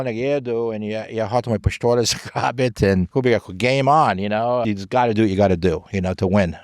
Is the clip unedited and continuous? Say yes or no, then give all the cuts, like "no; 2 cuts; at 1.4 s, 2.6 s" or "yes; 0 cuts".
no; 2 cuts; at 3.1 s, 4.6 s